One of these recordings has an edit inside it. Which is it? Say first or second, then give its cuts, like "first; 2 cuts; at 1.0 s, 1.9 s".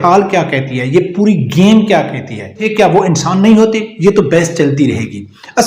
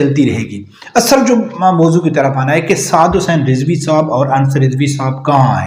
first; 1 cut; at 2.6 s